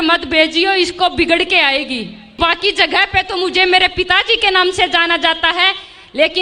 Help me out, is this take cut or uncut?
cut